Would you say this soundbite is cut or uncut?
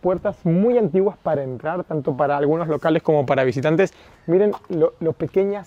uncut